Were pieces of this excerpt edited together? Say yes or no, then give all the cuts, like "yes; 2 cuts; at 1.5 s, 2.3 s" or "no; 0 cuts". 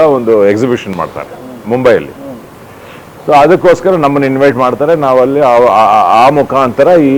no; 0 cuts